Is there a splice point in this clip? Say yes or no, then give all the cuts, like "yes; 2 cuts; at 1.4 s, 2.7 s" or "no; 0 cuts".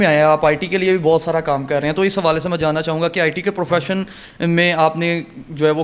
no; 0 cuts